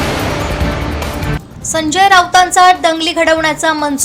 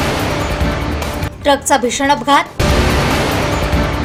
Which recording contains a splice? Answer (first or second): first